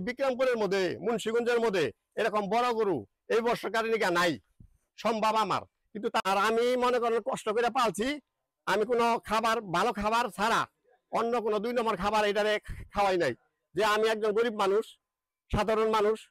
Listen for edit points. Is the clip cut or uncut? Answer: cut